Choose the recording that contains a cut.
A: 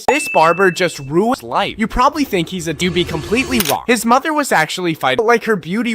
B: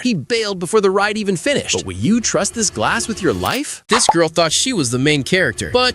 A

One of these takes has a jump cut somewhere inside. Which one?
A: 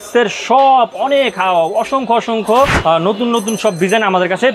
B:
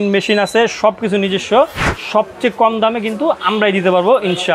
A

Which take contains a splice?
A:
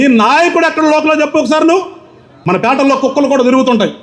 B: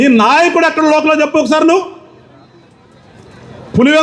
A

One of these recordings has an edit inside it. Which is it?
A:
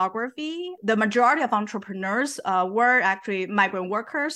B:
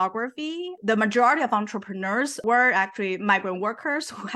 B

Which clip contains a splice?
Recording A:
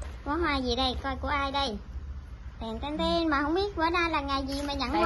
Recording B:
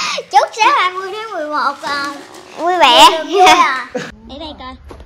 B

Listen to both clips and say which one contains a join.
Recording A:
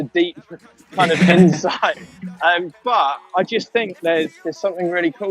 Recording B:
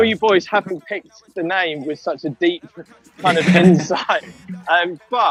A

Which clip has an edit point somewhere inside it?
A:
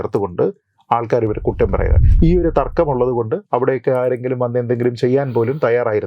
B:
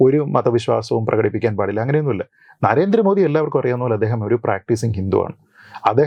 A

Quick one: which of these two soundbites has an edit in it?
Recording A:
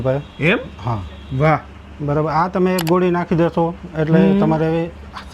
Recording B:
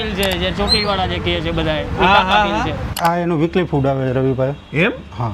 B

